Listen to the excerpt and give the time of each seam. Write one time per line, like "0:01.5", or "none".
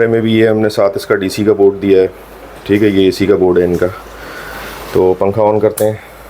none